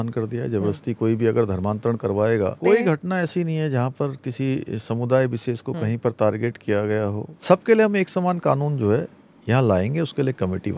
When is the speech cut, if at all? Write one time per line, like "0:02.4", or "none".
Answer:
0:02.6
0:07.3